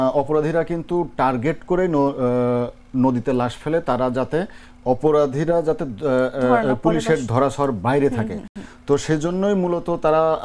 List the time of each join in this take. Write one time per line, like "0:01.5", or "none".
none